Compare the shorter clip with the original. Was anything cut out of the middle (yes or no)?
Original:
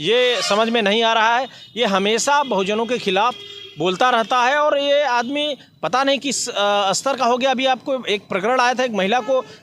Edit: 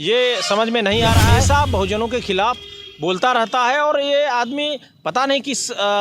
yes